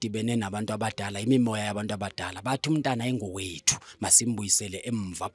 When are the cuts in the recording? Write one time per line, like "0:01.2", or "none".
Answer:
none